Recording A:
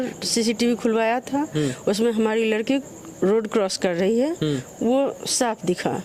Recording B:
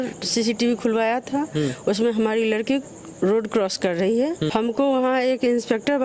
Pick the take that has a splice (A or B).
B